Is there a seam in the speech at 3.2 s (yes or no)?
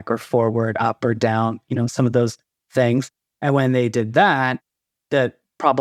no